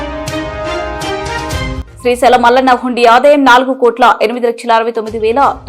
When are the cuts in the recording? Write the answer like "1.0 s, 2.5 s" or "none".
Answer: 1.1 s, 1.8 s